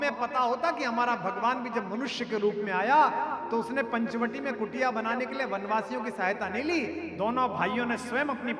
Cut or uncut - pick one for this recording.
uncut